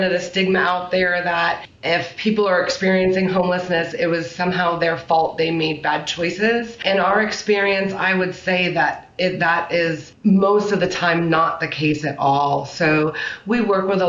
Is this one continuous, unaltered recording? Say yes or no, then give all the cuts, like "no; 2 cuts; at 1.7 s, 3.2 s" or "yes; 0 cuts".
no; 4 cuts; at 1.7 s, 3.9 s, 6.8 s, 10.1 s